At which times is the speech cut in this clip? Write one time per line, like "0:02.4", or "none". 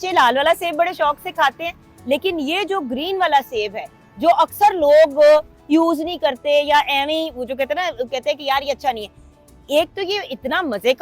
none